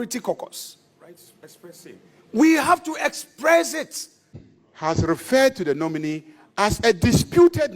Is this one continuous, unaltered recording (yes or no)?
no